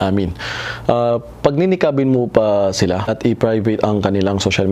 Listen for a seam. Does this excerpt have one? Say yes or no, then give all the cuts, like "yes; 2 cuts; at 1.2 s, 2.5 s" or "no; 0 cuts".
yes; 1 cut; at 3.1 s